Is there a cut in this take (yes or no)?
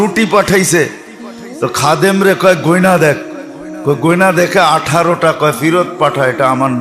no